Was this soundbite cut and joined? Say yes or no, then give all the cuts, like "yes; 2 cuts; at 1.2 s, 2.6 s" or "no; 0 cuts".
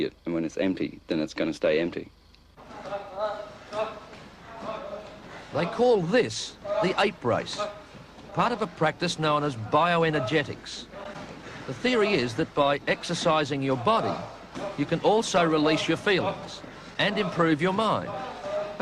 yes; 1 cut; at 1.6 s